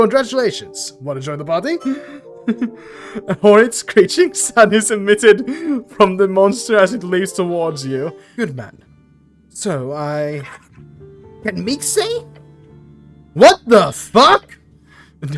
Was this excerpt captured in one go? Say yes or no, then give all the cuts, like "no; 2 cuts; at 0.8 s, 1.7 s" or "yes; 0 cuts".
no; 1 cut; at 8.2 s